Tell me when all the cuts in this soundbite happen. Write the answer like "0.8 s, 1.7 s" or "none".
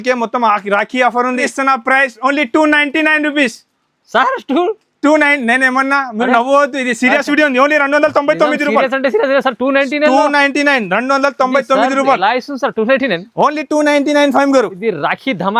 1.4 s